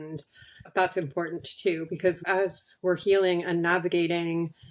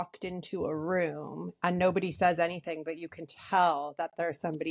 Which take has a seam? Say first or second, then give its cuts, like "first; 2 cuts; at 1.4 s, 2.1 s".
first; 1 cut; at 2.2 s